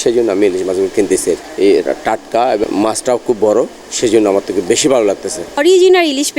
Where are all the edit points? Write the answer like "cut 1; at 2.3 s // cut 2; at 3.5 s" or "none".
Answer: cut 1; at 1.5 s // cut 2; at 2.6 s // cut 3; at 5.6 s